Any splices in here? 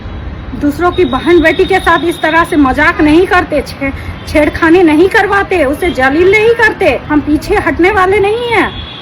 yes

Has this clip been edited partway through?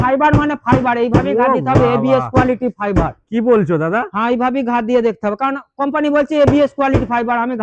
no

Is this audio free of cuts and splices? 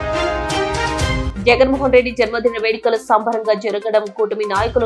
no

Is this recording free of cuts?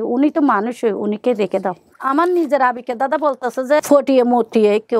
no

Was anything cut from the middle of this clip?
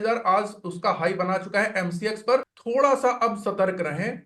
yes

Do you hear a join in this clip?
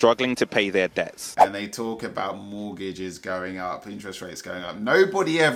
no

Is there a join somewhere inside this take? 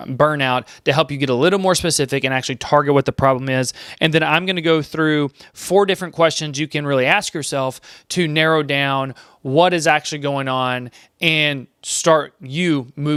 no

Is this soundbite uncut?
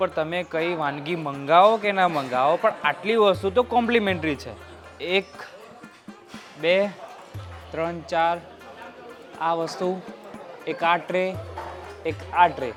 yes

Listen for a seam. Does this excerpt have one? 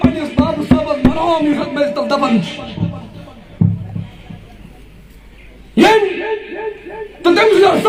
no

